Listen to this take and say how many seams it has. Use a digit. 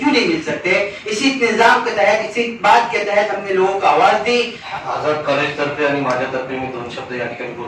1